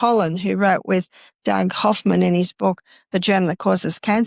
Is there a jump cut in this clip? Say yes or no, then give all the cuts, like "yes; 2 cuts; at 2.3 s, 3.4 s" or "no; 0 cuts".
no; 0 cuts